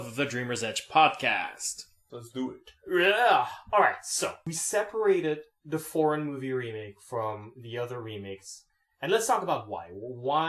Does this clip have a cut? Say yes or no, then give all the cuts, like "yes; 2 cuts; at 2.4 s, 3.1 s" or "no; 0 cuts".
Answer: yes; 1 cut; at 4.9 s